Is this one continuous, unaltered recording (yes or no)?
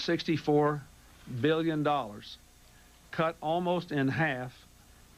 no